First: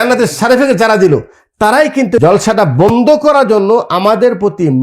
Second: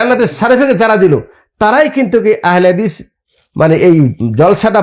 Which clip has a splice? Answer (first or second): first